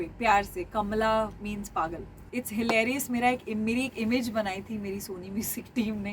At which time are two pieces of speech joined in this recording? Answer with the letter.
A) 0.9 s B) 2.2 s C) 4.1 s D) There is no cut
B